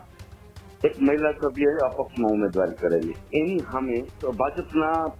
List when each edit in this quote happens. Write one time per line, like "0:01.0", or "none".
0:03.3
0:04.2